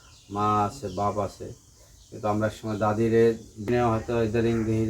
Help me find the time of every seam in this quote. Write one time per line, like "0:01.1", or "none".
0:03.7